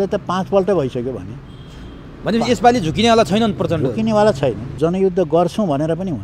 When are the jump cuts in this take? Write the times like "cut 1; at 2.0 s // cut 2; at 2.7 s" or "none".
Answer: cut 1; at 4.7 s